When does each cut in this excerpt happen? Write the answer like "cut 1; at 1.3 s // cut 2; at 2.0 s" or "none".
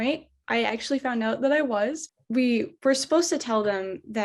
cut 1; at 2.1 s